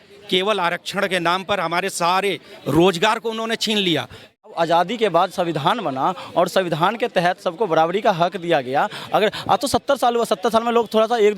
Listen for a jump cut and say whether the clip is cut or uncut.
cut